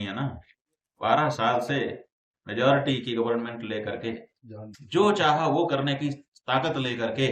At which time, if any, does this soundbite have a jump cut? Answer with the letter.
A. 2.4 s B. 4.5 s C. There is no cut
C